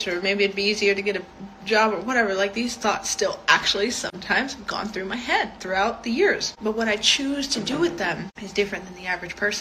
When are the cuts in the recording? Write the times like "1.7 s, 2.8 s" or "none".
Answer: 6.5 s, 8.4 s